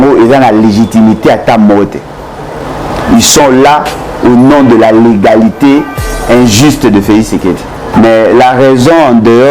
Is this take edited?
yes; 1 cut; at 7.9 s

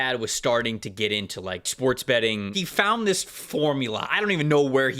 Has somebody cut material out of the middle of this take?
yes; 2 cuts; at 1.7 s, 2.6 s

